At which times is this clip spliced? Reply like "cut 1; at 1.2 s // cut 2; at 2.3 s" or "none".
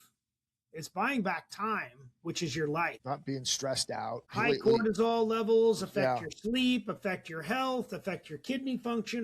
cut 1; at 3.0 s // cut 2; at 4.3 s